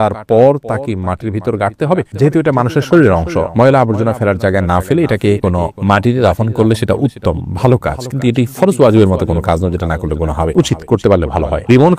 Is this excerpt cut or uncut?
uncut